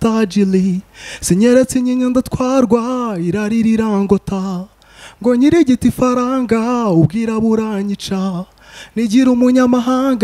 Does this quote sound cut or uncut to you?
uncut